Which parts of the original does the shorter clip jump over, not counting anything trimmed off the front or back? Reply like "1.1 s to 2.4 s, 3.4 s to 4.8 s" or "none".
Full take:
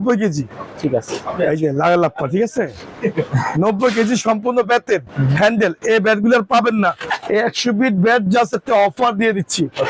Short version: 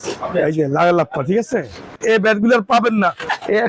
3.0 s to 5.7 s